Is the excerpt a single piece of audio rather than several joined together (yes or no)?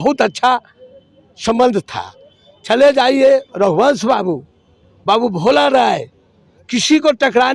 yes